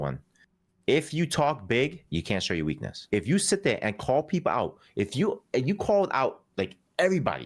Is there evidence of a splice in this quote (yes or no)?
yes